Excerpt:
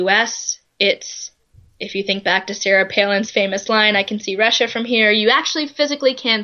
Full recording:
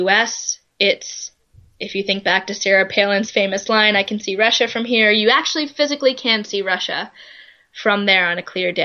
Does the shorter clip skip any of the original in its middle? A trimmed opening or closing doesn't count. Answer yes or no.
no